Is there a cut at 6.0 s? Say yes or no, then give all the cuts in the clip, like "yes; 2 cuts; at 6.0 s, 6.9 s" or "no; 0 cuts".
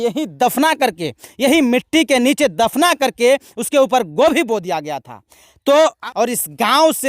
yes; 1 cut; at 6.0 s